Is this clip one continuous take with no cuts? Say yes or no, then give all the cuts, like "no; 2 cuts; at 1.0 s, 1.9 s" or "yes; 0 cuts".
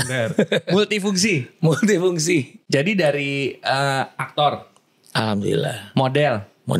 yes; 0 cuts